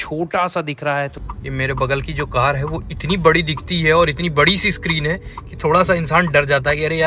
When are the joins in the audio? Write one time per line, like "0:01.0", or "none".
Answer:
0:01.1